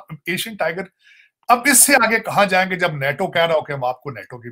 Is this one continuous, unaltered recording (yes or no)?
yes